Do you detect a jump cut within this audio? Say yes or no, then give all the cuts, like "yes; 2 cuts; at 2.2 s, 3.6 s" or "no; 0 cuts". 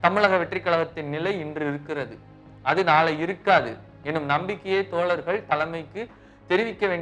no; 0 cuts